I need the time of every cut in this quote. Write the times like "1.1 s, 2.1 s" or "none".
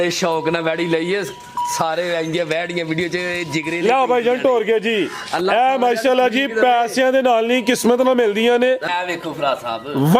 8.9 s

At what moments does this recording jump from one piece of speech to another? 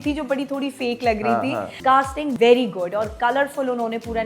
2.1 s

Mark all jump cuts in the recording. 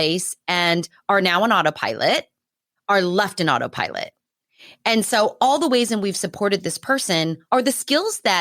7.4 s

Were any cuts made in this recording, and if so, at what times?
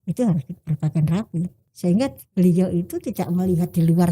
1.7 s

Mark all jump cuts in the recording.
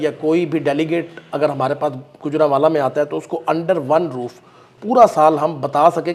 none

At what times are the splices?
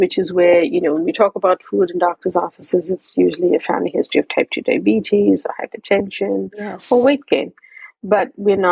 none

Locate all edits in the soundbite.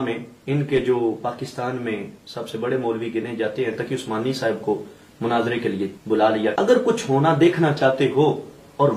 6.5 s

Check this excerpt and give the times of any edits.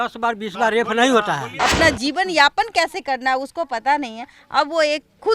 1.5 s

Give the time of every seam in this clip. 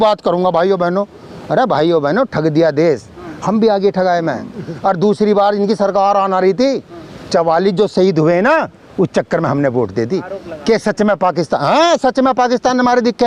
none

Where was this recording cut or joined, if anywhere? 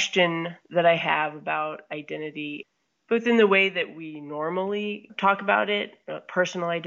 2.6 s, 5.1 s

